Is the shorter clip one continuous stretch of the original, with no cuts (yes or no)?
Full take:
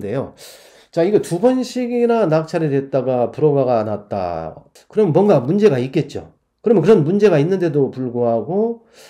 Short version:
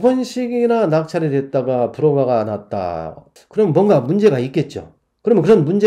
yes